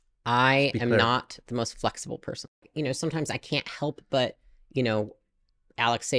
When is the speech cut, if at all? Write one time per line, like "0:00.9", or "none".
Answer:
0:02.7